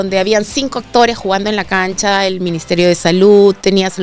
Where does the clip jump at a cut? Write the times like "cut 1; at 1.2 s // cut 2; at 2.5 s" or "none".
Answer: none